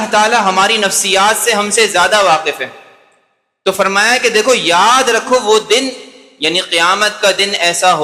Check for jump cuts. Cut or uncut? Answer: uncut